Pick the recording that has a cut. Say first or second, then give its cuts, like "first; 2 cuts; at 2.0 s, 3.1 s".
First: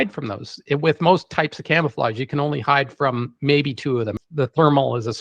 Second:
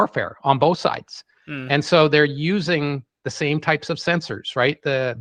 first; 1 cut; at 4.2 s